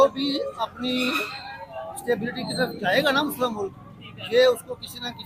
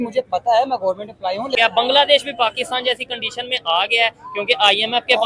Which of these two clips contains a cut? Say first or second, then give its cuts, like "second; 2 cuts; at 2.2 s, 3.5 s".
second; 1 cut; at 1.6 s